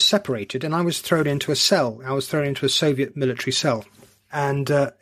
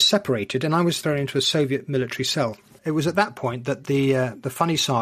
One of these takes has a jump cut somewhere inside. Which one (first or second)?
second